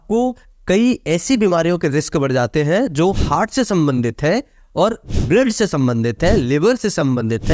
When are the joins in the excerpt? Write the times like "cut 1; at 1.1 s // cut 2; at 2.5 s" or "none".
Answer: cut 1; at 5.1 s